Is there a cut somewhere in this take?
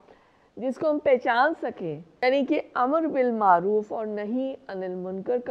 yes; 1 cut; at 2.2 s

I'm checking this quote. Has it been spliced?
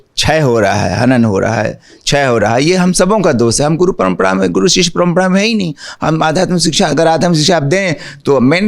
yes; 1 cut; at 5.9 s

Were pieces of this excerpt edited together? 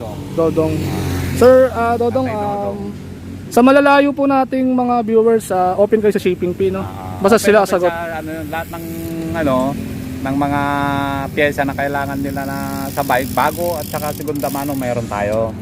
no; 0 cuts

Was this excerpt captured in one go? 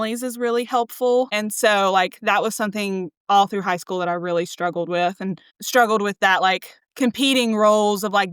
no; 1 cut; at 1.3 s

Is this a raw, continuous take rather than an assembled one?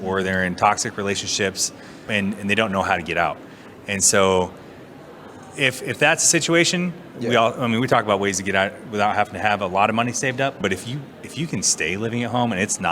no; 1 cut; at 10.6 s

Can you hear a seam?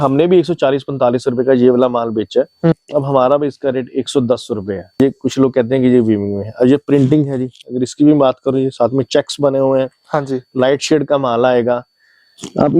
yes; 2 cuts; at 2.7 s, 5.0 s

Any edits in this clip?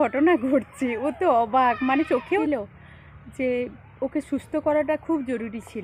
yes; 1 cut; at 2.4 s

